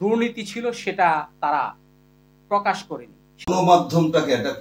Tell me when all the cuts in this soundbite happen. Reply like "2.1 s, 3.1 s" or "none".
3.5 s